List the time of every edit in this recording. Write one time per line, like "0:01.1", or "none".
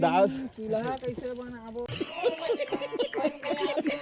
0:01.9